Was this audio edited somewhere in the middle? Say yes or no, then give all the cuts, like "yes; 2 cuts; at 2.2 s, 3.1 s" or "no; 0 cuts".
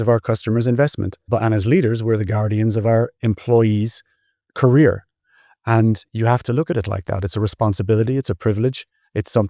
yes; 1 cut; at 1.3 s